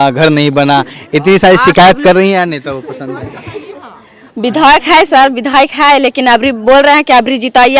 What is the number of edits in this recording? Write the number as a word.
zero